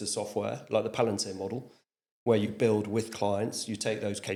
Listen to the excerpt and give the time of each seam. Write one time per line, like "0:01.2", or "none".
none